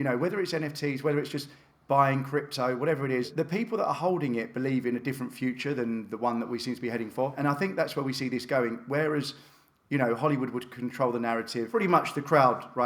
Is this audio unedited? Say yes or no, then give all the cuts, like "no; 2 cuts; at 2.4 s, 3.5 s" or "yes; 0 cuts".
no; 3 cuts; at 3.3 s, 7.4 s, 11.7 s